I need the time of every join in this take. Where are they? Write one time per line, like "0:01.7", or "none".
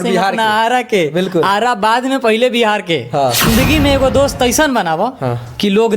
0:03.4